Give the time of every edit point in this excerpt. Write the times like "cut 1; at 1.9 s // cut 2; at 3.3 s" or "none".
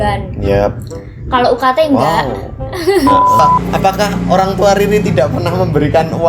cut 1; at 3.4 s

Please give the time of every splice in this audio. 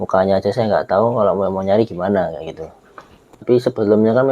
cut 1; at 3.3 s

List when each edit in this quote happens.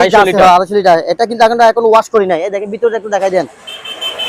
none

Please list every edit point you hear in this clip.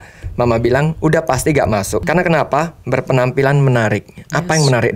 cut 1; at 2.0 s

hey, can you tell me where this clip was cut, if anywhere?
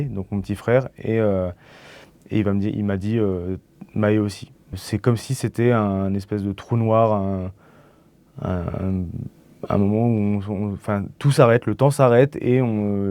cut 1; at 4.7 s

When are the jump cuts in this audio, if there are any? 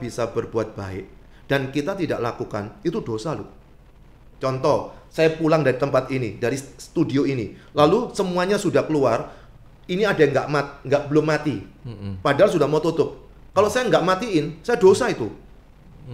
none

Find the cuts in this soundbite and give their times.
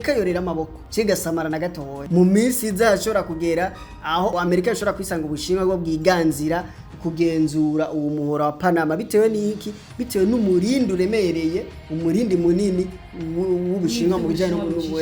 none

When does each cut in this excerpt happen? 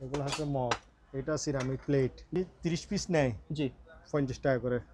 cut 1; at 2.4 s

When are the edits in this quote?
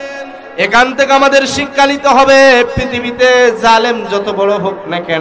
none

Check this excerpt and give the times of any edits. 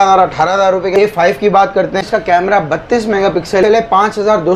cut 1; at 0.9 s // cut 2; at 2.1 s // cut 3; at 3.6 s

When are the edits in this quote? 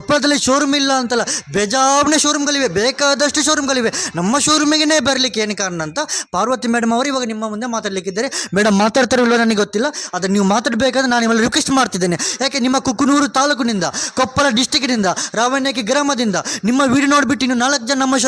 none

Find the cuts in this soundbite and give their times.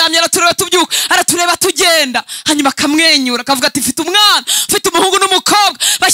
none

